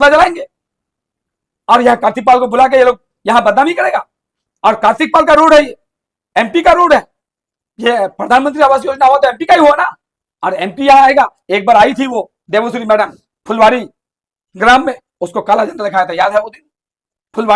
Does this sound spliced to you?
no; 0 cuts

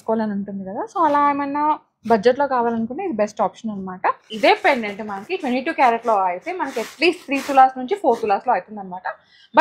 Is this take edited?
yes; 1 cut; at 4.3 s

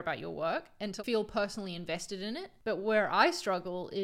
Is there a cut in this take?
yes; 2 cuts; at 1.0 s, 2.5 s

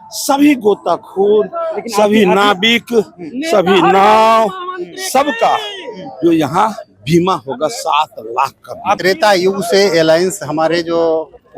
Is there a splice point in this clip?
yes; 1 cut; at 9.0 s

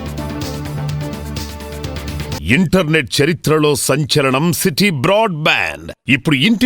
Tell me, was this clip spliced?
yes; 1 cut; at 2.3 s

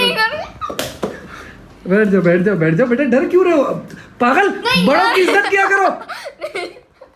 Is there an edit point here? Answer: no; 0 cuts

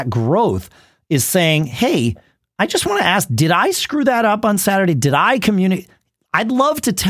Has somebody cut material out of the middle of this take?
no; 0 cuts

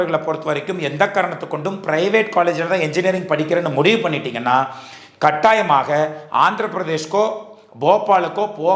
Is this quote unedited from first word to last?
yes; 0 cuts

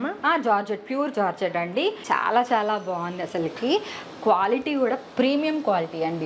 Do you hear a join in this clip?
yes; 1 cut; at 2.0 s

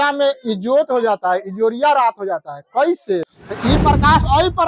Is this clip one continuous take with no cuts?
no; 1 cut; at 3.3 s

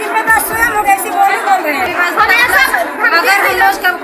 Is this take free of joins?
no; 1 cut; at 1.9 s

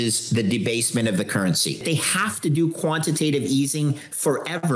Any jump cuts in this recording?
yes; 1 cut; at 1.8 s

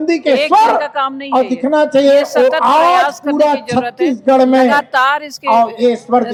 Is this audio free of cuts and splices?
yes; 0 cuts

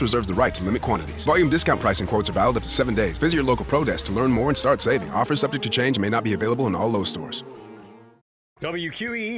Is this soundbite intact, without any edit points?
no; 1 cut; at 8.4 s

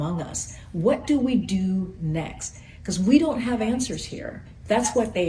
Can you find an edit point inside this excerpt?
no; 0 cuts

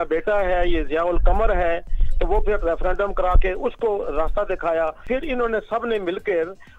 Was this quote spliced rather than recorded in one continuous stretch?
yes; 1 cut; at 5.0 s

